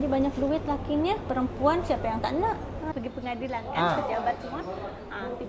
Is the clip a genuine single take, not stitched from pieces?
no; 1 cut; at 2.8 s

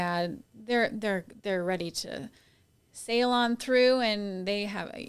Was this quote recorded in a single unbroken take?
yes; 0 cuts

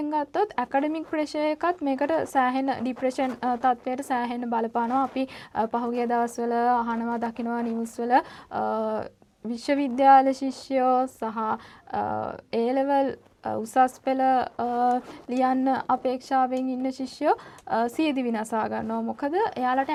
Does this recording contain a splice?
no; 0 cuts

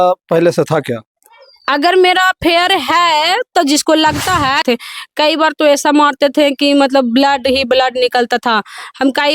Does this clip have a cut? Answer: yes; 1 cut; at 4.6 s

